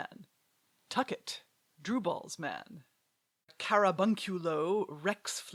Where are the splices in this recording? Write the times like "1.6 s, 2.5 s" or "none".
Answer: none